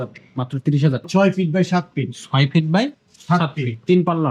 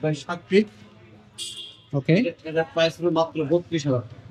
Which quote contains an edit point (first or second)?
first